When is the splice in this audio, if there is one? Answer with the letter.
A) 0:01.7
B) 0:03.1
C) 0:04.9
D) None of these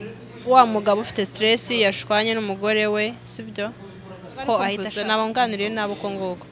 C